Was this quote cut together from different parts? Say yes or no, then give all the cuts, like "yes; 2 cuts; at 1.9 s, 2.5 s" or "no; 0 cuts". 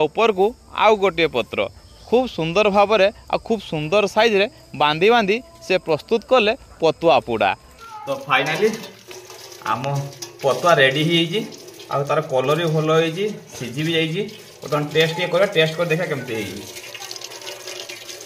yes; 2 cuts; at 7.7 s, 16.8 s